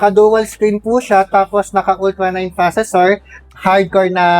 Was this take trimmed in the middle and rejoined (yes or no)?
yes